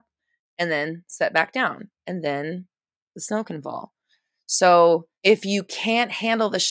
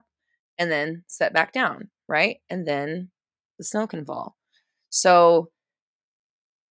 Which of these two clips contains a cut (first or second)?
first